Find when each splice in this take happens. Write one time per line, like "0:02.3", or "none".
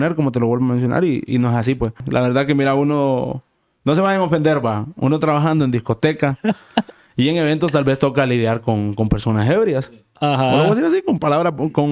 0:01.9